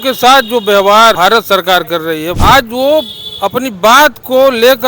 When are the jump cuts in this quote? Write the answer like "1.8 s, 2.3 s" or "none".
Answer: 1.2 s, 2.3 s